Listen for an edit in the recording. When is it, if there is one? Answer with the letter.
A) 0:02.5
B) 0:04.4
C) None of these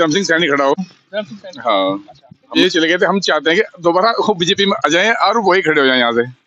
A